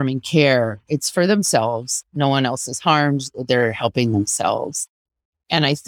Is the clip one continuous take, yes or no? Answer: yes